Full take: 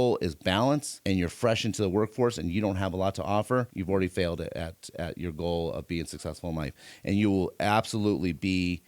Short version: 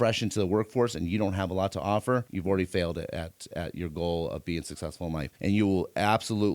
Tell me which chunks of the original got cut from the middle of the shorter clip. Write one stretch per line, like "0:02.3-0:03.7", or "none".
0:06.7-0:07.0